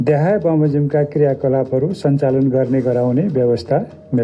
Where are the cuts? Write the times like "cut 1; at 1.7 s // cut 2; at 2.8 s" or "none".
none